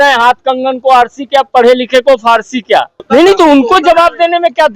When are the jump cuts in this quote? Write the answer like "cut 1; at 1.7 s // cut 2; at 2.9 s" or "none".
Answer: cut 1; at 3.0 s